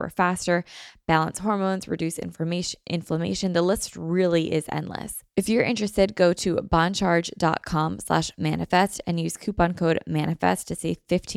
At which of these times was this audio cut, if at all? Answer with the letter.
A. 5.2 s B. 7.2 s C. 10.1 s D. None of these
A